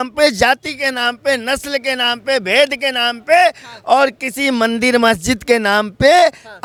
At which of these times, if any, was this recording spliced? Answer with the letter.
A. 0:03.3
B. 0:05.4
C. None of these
C